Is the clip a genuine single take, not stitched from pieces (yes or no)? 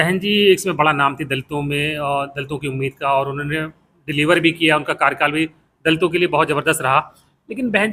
yes